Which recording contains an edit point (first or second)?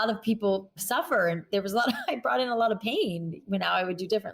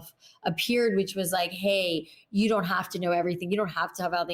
first